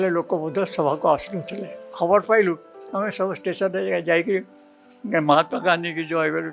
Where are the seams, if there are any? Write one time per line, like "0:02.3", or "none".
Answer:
0:01.9